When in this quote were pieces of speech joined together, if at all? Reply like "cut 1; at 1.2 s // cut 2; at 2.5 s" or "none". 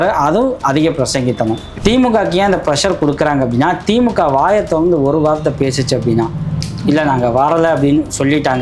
cut 1; at 1.7 s